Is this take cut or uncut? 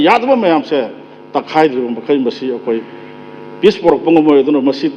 uncut